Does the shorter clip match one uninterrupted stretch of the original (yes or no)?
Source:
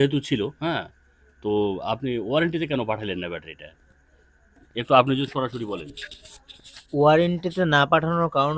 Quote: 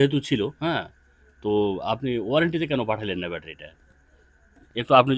yes